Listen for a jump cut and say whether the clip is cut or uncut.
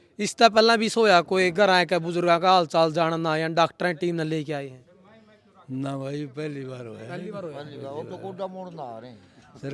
uncut